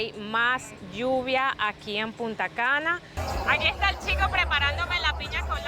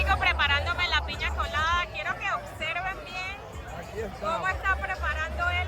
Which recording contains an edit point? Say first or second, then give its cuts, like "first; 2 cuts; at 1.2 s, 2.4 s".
first; 1 cut; at 3.1 s